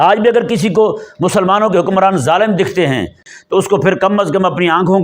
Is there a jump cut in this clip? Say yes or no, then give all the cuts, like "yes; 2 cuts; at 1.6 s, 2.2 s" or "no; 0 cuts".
yes; 1 cut; at 3.3 s